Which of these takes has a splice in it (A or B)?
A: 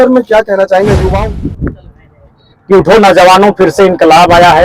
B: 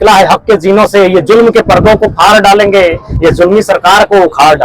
A